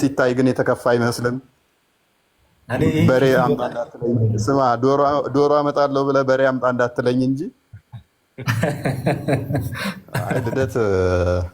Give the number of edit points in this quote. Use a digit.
1